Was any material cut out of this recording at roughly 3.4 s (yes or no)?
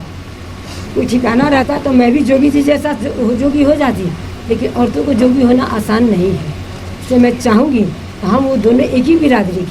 no